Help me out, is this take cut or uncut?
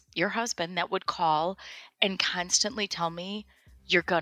uncut